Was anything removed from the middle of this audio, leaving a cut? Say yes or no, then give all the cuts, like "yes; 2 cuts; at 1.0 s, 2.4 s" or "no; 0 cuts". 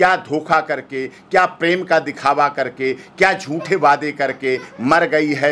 no; 0 cuts